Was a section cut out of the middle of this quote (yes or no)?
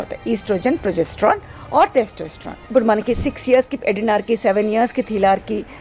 yes